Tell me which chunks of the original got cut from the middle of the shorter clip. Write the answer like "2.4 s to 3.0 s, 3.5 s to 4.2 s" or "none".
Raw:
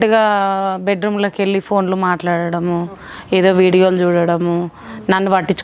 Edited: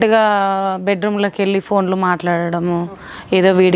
none